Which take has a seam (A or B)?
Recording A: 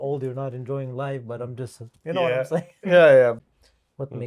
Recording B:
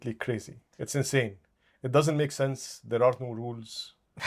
A